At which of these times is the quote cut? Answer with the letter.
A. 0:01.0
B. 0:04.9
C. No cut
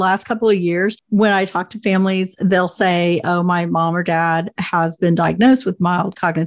A